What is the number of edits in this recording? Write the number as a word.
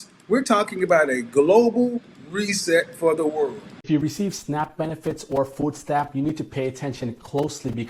one